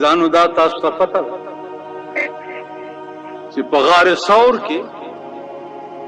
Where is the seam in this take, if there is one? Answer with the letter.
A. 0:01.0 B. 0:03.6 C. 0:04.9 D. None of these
C